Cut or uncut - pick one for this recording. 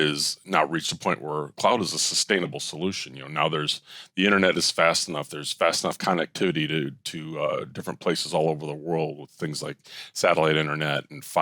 uncut